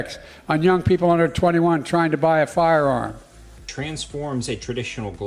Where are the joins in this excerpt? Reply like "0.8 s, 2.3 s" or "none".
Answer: 3.7 s